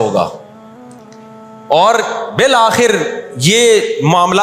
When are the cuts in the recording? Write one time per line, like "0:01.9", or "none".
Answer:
none